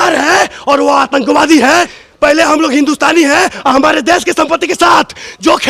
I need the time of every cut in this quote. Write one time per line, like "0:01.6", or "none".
0:02.0